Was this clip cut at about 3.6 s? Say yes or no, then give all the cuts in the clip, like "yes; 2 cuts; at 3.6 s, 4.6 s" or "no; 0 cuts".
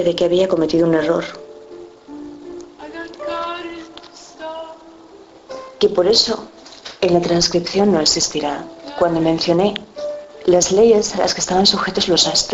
yes; 1 cut; at 3.6 s